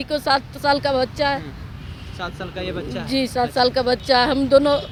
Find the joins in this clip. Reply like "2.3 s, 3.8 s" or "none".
none